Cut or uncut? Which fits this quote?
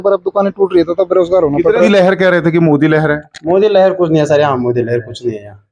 cut